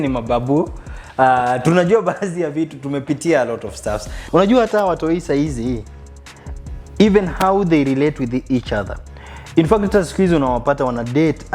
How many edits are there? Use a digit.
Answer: 1